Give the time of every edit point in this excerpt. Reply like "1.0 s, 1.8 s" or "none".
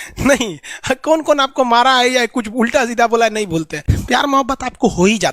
3.9 s

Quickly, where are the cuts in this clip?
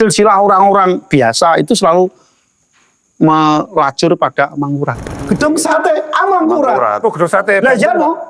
5.2 s

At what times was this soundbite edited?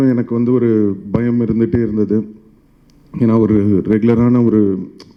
none

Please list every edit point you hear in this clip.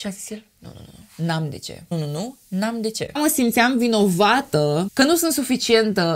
none

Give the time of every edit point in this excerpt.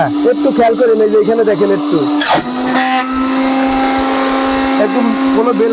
none

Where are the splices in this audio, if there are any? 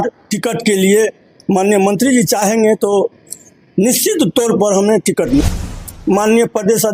5.4 s

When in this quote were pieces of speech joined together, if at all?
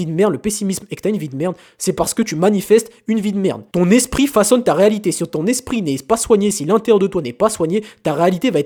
none

